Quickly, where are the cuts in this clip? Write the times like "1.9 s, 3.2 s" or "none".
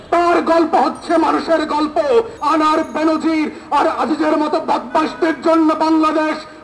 2.4 s